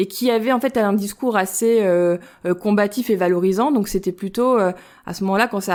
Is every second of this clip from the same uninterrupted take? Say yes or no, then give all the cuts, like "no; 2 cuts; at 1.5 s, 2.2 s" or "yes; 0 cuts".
yes; 0 cuts